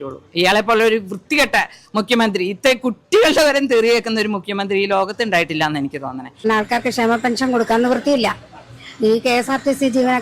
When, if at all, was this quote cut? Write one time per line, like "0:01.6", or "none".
0:06.4